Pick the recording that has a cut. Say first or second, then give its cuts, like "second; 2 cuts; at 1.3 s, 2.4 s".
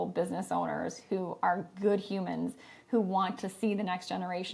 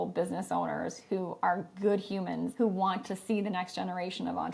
second; 1 cut; at 2.5 s